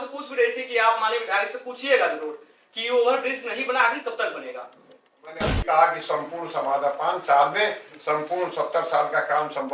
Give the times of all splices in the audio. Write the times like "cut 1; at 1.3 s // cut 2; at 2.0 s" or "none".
cut 1; at 5.5 s